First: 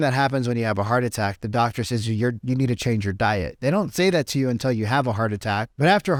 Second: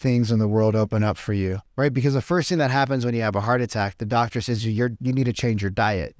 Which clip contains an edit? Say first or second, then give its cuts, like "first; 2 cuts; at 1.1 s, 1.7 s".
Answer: second; 1 cut; at 1.7 s